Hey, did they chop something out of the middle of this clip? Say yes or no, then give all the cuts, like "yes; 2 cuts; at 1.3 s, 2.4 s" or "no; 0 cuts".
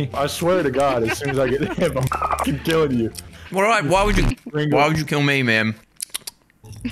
no; 0 cuts